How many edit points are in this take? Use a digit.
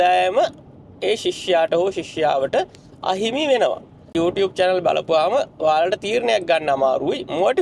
1